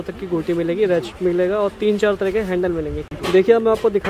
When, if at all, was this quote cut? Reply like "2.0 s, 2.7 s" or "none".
3.0 s